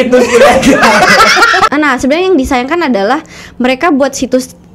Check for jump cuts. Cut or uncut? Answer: cut